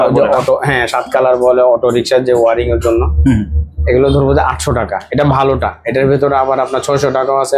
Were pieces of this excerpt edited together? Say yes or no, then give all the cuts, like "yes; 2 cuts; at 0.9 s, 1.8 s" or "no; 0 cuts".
no; 0 cuts